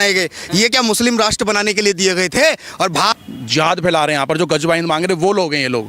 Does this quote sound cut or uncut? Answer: cut